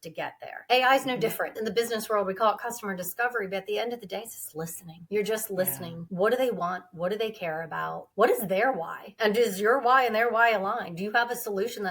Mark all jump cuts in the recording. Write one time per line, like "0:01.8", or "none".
0:01.5